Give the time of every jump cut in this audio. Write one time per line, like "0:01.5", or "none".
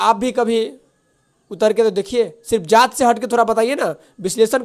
none